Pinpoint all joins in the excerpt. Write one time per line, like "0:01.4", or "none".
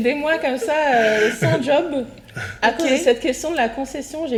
none